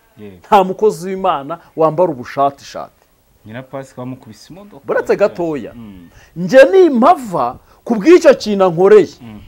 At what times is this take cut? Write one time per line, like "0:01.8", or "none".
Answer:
none